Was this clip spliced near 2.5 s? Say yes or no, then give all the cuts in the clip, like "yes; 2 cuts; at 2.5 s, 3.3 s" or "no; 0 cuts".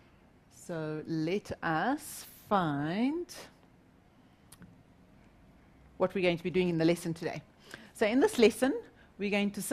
yes; 1 cut; at 2.5 s